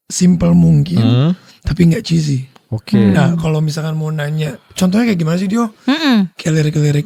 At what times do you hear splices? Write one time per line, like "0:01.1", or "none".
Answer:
none